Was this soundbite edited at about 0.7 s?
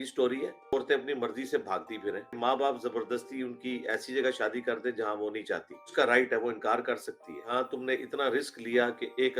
yes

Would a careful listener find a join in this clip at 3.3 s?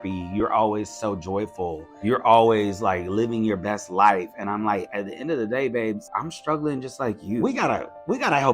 no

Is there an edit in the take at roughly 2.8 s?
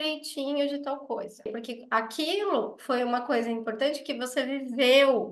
no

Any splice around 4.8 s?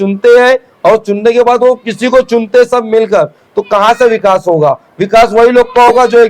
no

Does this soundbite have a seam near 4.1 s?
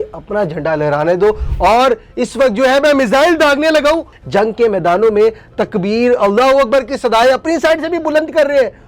yes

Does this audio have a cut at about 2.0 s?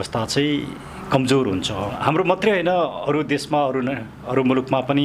yes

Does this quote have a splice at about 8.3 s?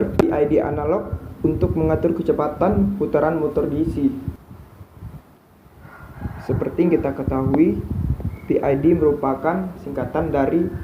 no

